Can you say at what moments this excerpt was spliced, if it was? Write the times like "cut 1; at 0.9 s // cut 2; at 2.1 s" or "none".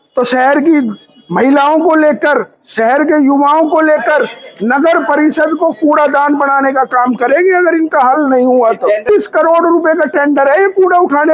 cut 1; at 9.0 s